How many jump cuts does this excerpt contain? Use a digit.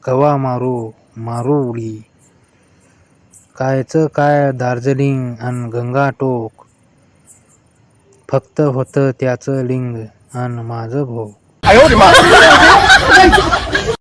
0